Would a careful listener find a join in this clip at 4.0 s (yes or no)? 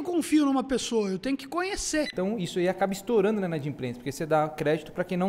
no